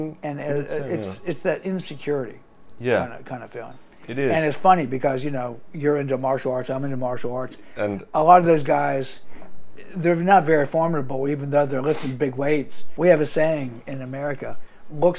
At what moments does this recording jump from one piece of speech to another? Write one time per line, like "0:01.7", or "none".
0:12.8